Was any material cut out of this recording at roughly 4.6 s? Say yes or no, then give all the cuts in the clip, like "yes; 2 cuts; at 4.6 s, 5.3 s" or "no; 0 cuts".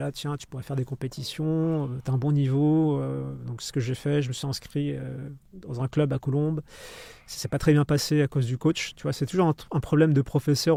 no; 0 cuts